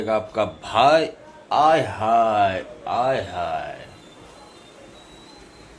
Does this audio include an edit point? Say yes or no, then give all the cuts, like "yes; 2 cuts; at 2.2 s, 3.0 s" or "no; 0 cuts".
no; 0 cuts